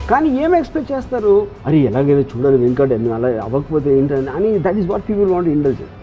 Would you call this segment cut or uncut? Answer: uncut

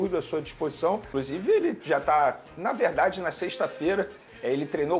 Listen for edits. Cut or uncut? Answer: cut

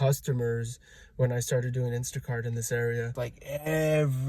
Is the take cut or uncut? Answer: cut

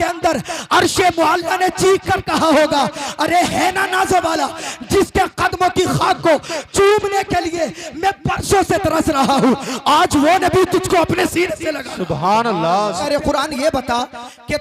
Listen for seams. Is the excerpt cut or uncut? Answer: cut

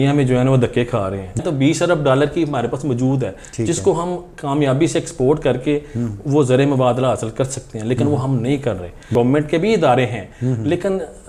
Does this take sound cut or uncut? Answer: cut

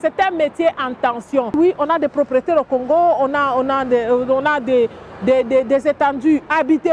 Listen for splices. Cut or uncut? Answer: cut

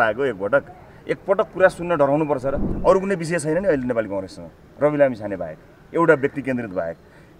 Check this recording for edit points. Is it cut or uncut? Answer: cut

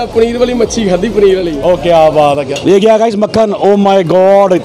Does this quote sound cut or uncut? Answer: cut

